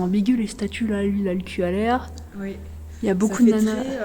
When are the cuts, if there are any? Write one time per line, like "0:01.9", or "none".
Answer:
none